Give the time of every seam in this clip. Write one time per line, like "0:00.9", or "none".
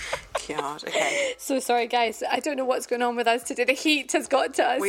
none